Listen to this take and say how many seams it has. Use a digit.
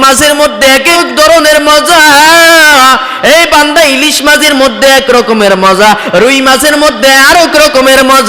1